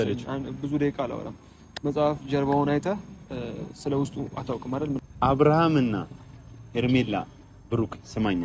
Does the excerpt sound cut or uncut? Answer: cut